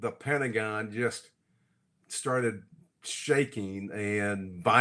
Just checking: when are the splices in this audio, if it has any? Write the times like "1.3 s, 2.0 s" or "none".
none

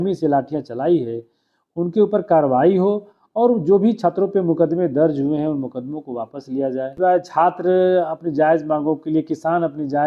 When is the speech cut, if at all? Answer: 6.9 s

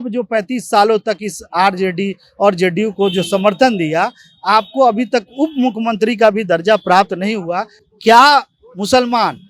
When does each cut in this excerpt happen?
none

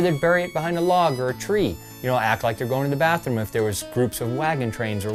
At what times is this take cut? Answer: none

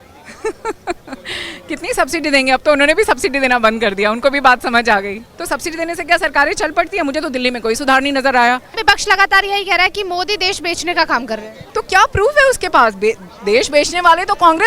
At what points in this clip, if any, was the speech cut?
5.3 s, 8.7 s, 11.6 s

